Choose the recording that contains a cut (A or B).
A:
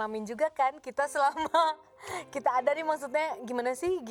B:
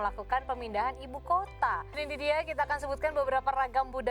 B